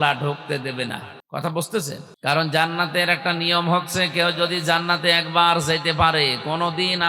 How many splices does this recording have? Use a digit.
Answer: 2